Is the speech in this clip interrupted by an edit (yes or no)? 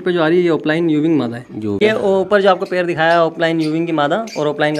yes